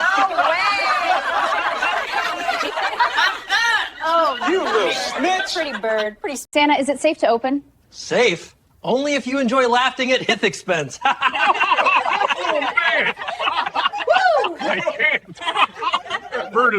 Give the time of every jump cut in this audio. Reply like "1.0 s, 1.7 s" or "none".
6.4 s